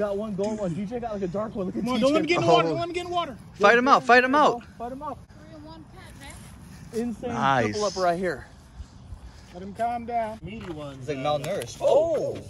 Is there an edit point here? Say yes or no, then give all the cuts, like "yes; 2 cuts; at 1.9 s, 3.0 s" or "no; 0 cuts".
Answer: yes; 2 cuts; at 5.3 s, 10.5 s